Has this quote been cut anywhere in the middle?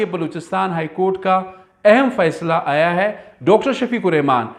no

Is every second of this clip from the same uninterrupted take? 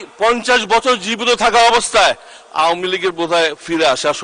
yes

